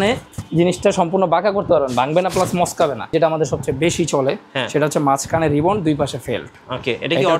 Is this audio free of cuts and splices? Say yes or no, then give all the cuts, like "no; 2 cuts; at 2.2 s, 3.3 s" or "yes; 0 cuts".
no; 1 cut; at 3.1 s